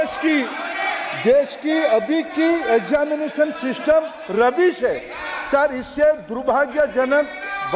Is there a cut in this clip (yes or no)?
no